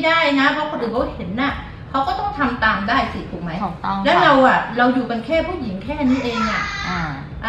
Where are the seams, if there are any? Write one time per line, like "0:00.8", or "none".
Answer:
none